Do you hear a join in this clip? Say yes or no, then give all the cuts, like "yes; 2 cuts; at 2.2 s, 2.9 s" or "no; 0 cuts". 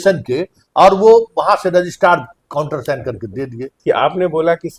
yes; 1 cut; at 3.8 s